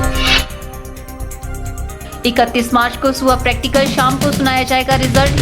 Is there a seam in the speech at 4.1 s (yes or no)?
no